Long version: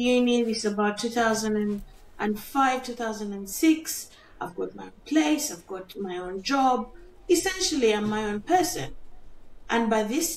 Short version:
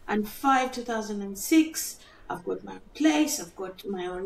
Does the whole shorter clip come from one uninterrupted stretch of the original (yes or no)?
yes